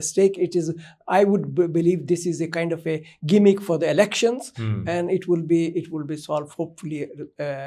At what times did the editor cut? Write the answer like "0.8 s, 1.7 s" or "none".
none

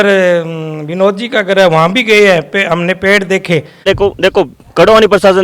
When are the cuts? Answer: 3.9 s

